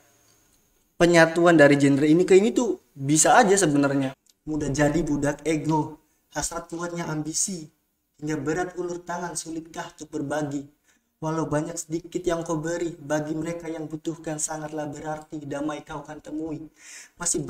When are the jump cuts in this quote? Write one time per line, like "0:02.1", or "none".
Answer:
0:04.1